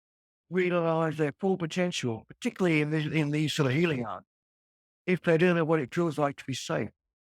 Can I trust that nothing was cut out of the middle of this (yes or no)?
yes